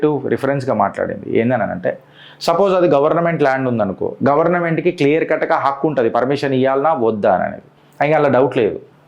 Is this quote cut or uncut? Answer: uncut